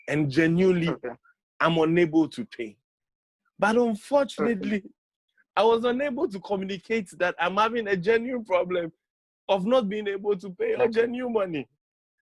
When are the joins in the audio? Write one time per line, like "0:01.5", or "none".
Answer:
none